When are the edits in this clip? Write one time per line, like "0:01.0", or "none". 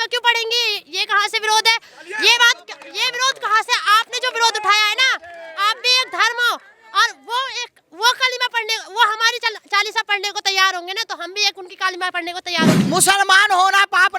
0:12.8

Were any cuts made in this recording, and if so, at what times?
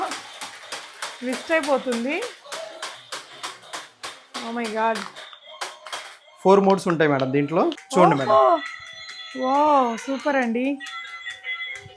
0:07.8

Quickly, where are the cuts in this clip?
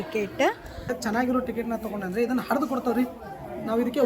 0:00.9

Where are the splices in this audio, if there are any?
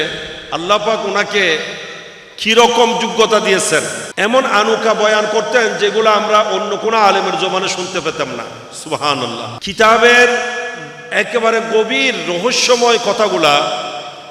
0:04.0
0:09.6

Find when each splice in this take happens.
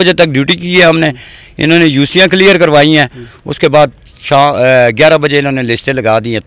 none

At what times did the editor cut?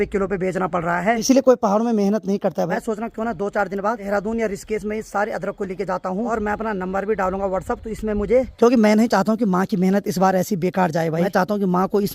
0:01.2
0:02.7
0:04.0
0:06.3
0:08.5
0:11.3

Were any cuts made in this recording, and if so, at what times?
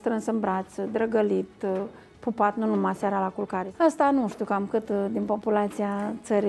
0:03.7

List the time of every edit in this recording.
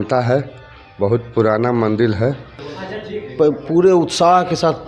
0:02.5

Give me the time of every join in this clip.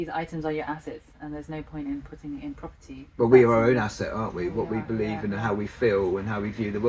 none

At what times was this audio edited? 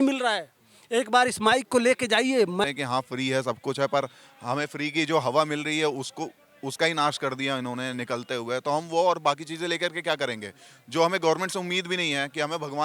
0:02.6

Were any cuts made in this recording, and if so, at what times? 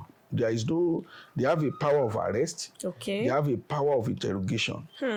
none

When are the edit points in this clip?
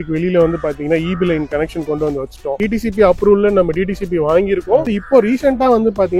0:02.6
0:04.9

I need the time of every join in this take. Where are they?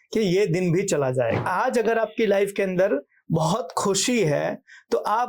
0:01.4

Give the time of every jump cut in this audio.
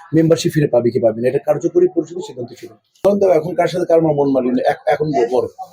0:03.1

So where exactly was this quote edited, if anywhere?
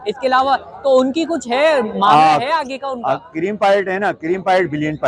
none

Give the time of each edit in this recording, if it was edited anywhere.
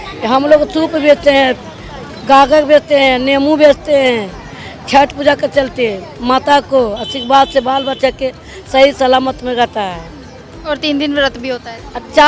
none

